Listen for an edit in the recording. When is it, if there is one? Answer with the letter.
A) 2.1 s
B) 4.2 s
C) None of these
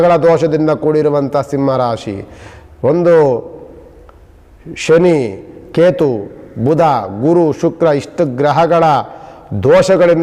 C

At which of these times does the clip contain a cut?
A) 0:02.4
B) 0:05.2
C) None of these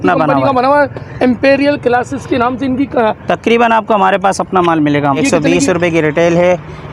B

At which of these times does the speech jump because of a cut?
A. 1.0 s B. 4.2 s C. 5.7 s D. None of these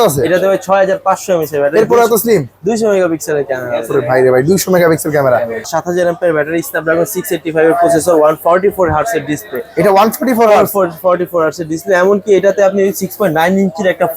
C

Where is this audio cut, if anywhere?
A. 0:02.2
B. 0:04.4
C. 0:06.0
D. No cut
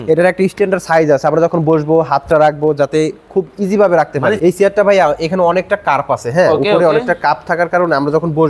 B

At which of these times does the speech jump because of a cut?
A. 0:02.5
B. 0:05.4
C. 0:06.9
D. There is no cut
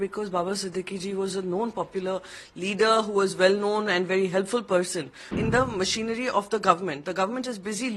B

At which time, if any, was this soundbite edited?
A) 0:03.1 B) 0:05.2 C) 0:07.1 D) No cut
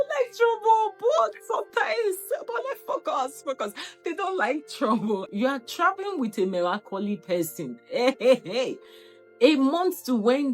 B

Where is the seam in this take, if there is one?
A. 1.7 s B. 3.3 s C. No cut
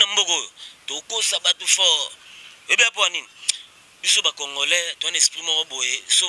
C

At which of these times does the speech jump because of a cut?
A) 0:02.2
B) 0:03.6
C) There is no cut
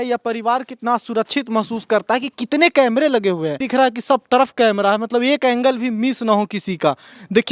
B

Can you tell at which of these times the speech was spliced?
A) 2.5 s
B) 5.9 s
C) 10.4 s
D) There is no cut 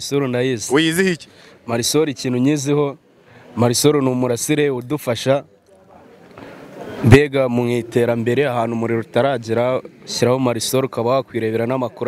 D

